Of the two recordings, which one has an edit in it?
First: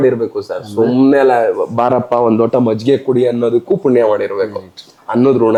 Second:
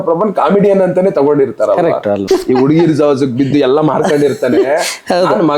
second; 1 cut; at 2.2 s

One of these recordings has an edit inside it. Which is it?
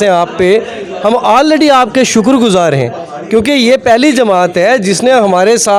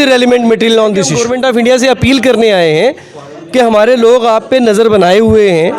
second; 1 cut; at 1.2 s

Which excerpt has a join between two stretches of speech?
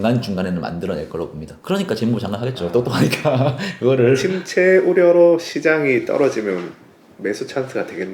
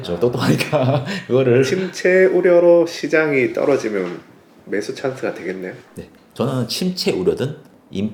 first; 1 cut; at 1.5 s

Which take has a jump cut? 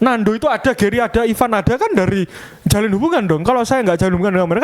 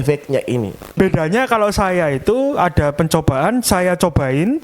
second; 1 cut; at 1.0 s

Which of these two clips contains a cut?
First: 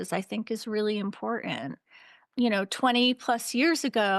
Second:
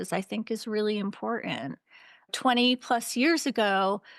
second; 1 cut; at 2.3 s

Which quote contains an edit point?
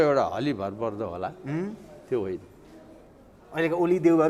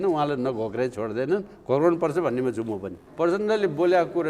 second; 1 cut; at 3.0 s

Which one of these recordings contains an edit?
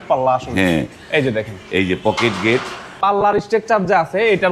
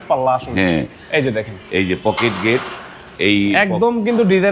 first; 1 cut; at 3.0 s

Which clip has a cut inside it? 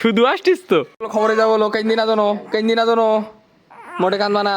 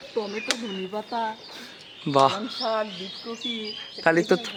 first; 1 cut; at 1.0 s

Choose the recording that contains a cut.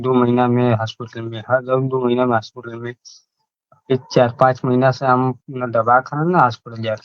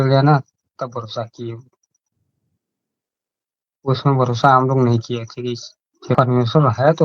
second; 1 cut; at 6.2 s

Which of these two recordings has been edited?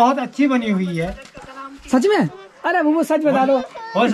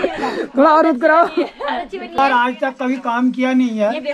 second; 1 cut; at 2.2 s

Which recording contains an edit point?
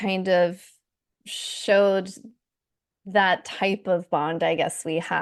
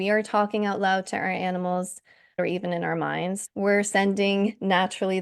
second; 2 cuts; at 2.4 s, 3.4 s

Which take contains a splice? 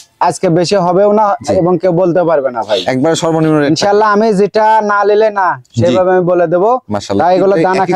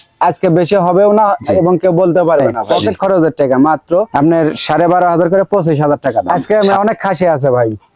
second; 2 cuts; at 2.6 s, 6.3 s

